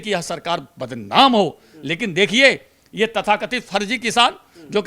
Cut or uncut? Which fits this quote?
uncut